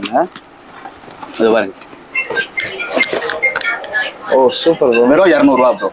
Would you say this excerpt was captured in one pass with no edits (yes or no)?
yes